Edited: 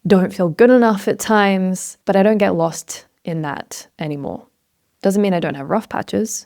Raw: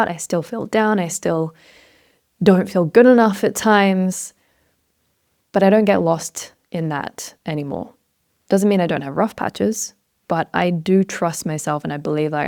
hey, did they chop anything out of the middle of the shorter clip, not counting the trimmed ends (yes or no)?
yes